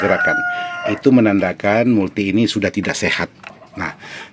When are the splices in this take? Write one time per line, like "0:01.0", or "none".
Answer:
0:03.4